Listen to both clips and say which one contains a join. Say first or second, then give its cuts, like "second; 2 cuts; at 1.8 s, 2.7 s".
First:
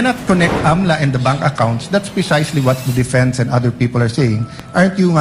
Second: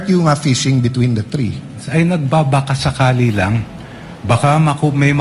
second; 1 cut; at 1.8 s